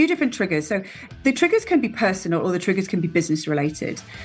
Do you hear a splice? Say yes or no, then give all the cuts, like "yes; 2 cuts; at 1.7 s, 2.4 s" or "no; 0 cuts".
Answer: yes; 1 cut; at 1.1 s